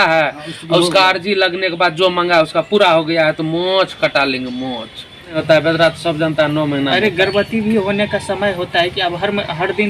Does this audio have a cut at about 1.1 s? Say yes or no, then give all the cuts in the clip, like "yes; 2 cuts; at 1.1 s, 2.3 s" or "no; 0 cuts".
no; 1 cut; at 5.4 s